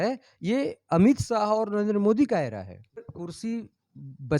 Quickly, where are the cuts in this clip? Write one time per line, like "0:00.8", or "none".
0:03.1